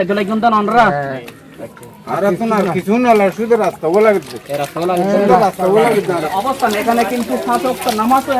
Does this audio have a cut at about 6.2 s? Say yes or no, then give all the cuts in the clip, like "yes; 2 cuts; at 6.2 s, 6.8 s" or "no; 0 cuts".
yes; 1 cut; at 6.2 s